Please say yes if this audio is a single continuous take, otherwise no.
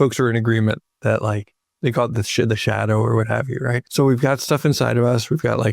no